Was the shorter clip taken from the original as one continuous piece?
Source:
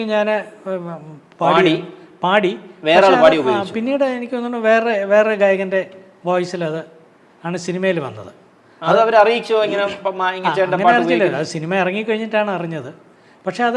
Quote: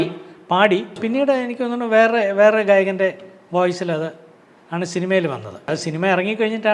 no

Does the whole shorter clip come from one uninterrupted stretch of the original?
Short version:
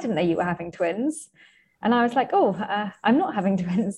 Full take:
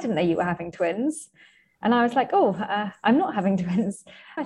yes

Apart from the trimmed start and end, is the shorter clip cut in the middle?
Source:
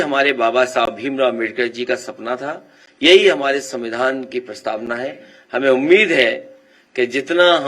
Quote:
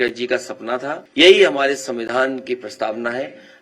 yes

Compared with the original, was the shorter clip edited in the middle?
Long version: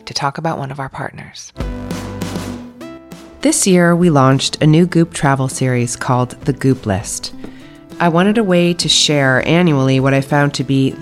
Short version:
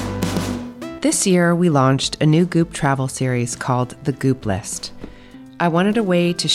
yes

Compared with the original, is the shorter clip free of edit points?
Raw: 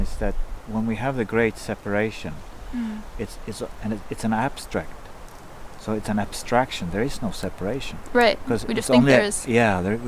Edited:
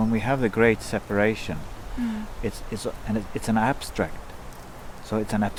yes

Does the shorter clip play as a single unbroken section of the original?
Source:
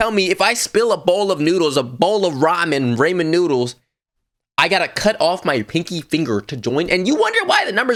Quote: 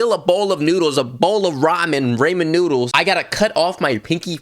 no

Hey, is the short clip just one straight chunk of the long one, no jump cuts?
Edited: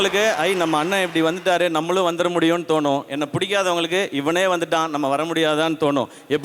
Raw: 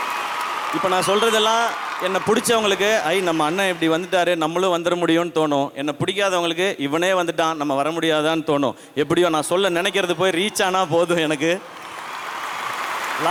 yes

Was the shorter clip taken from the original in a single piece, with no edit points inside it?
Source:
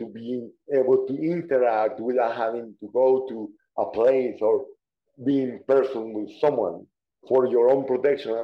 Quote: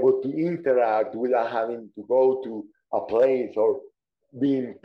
yes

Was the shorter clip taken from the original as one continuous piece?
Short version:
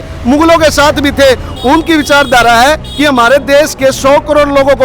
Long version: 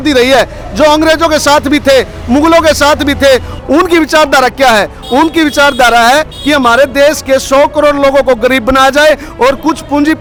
no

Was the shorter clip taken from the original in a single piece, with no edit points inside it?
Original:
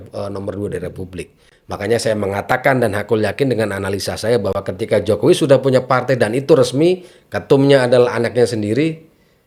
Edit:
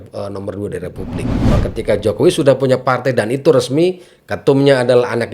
no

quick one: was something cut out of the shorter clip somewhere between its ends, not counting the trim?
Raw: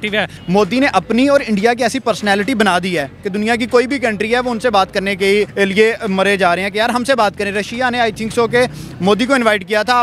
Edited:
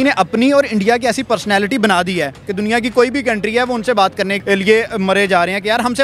yes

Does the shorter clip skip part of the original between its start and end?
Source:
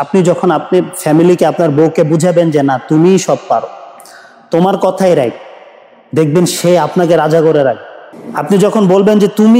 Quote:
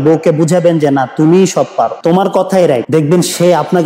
yes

